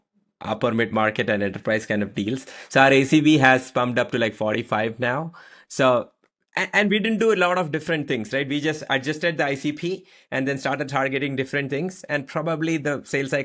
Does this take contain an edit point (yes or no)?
no